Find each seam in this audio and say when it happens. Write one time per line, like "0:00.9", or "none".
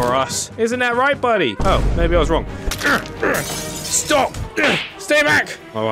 0:04.4